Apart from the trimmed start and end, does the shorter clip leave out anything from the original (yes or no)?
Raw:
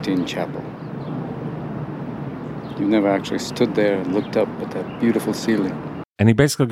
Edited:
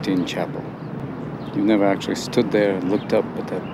yes